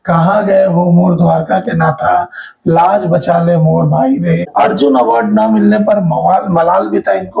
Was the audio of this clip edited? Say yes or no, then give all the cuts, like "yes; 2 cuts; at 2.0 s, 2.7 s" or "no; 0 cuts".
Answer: yes; 1 cut; at 4.5 s